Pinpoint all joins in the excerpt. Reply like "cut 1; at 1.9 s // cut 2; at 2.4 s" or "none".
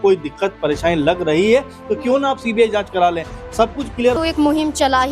cut 1; at 4.2 s